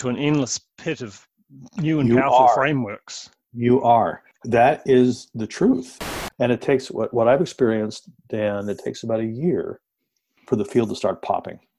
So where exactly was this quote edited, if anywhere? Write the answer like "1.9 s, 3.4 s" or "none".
4.2 s, 6.1 s